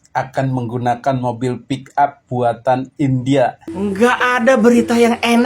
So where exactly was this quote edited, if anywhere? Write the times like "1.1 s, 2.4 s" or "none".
3.6 s